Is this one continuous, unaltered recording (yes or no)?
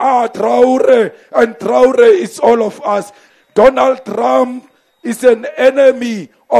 no